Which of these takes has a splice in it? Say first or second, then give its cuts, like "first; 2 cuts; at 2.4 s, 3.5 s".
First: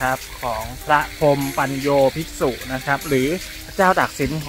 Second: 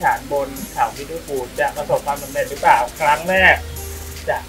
first; 1 cut; at 3.6 s